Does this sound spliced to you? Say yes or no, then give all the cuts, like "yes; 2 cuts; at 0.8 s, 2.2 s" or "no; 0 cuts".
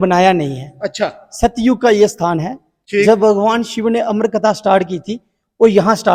no; 0 cuts